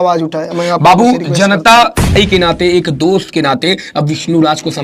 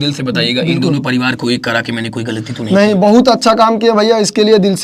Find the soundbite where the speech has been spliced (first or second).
first